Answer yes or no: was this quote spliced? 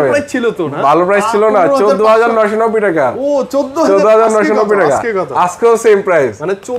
no